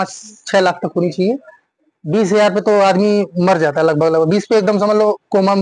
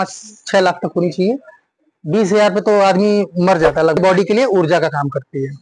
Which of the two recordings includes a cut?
second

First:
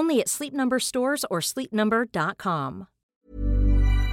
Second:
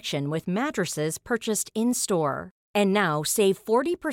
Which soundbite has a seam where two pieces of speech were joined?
first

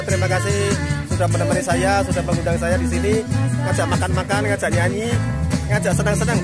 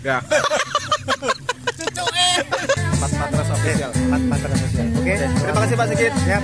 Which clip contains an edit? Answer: second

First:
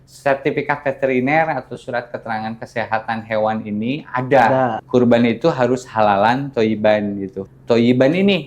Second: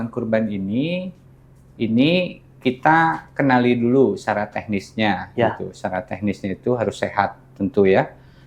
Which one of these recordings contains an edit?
first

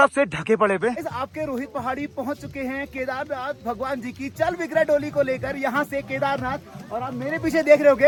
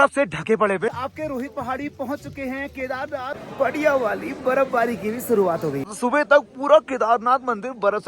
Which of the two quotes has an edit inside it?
second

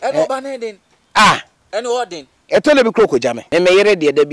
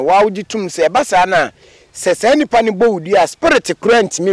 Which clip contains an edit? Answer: first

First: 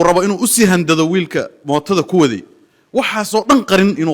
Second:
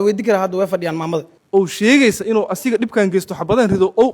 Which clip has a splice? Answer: second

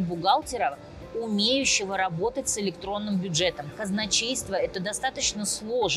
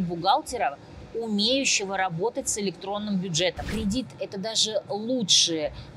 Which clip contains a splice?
second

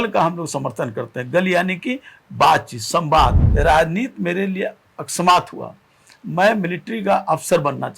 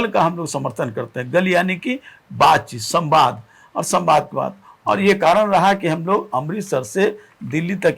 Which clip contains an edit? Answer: first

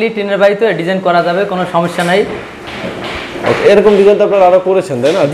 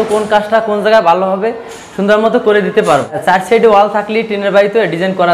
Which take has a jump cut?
second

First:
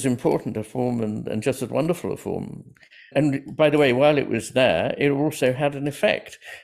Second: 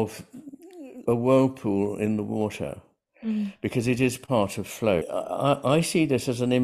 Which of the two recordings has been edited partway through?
second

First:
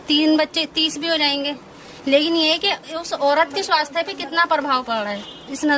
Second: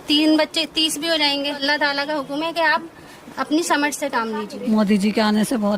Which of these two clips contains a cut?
second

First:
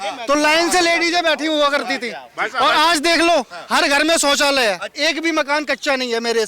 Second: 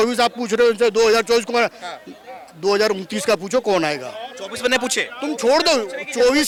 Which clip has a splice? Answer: first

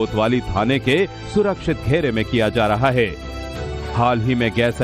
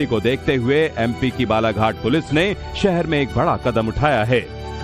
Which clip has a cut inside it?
second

